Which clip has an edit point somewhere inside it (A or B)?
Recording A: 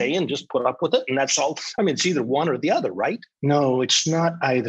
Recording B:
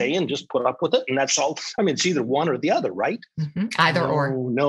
A